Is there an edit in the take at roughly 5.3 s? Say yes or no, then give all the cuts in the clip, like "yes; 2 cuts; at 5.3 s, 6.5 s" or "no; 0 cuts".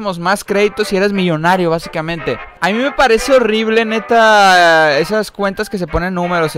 no; 1 cut; at 2.5 s